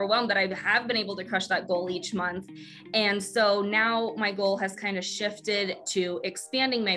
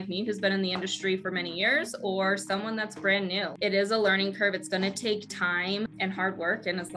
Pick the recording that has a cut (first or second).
second